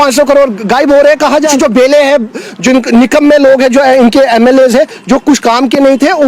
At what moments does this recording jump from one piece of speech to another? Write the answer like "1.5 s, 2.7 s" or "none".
1.5 s